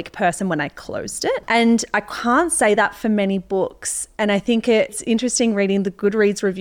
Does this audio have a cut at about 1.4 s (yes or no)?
yes